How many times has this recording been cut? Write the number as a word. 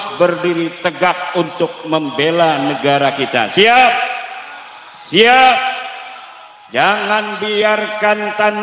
zero